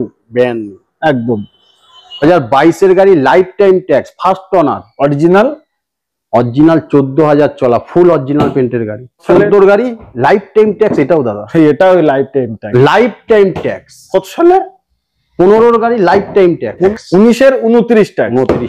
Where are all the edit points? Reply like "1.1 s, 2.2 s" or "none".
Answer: 2.2 s, 9.2 s, 12.6 s, 16.9 s

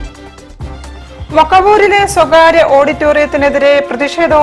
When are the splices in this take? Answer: 1.0 s

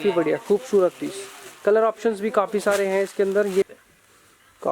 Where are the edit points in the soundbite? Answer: 3.7 s

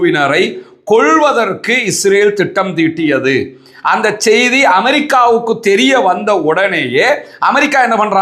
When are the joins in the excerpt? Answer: none

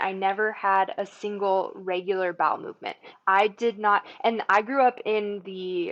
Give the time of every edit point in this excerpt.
none

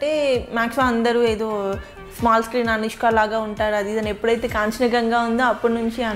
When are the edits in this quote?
none

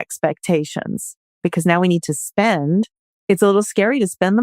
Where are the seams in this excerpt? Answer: 3.1 s

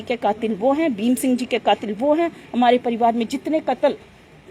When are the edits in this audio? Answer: none

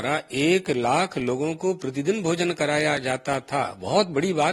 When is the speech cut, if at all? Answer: none

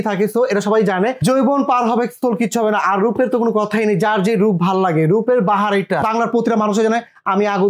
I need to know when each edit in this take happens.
1.2 s, 6.0 s

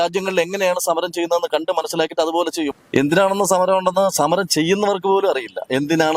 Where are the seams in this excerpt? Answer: 2.7 s

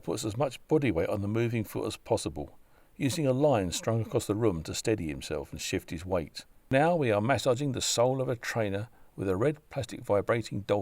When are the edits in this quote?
6.7 s

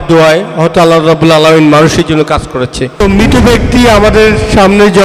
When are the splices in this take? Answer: 2.9 s

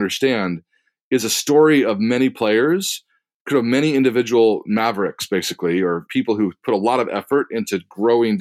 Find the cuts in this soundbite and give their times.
6.1 s

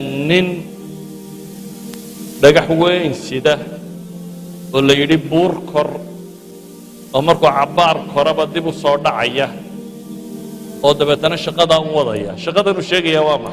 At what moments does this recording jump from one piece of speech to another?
1.0 s, 2.4 s

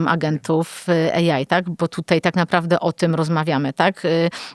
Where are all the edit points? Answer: none

